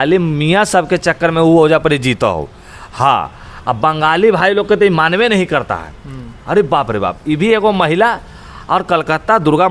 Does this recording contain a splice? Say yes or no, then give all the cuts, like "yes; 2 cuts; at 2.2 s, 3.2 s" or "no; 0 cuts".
no; 0 cuts